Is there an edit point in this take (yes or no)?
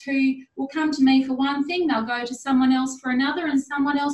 no